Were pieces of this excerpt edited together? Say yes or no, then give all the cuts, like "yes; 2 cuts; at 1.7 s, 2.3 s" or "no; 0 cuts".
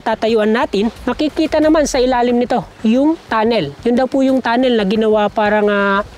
yes; 2 cuts; at 1.0 s, 3.6 s